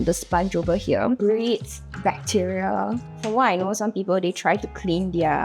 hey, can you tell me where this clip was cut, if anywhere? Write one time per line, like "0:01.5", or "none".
0:01.2
0:03.1